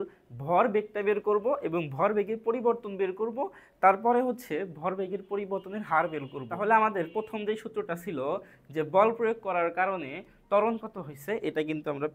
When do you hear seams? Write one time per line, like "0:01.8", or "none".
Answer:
0:06.4